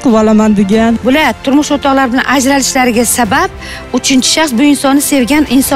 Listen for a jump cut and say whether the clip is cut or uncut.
cut